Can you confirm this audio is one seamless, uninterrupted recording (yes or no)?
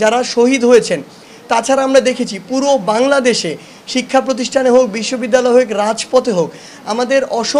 yes